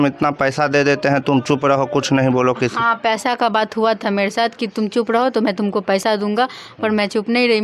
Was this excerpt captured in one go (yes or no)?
yes